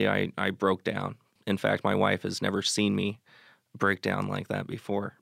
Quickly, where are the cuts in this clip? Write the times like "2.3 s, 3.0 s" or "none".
1.4 s